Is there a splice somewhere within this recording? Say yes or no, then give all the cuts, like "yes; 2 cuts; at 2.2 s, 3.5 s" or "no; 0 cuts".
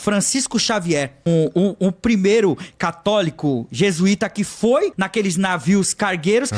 yes; 2 cuts; at 1.3 s, 5.0 s